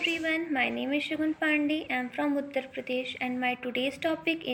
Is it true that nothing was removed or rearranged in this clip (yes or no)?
yes